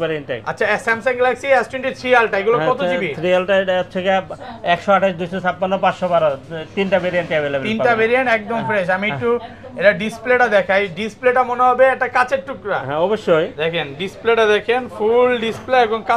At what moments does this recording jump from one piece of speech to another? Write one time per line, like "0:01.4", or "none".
none